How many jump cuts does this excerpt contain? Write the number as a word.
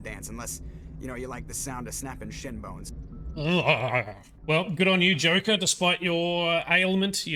zero